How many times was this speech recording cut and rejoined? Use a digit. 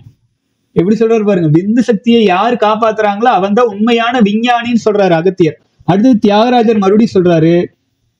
1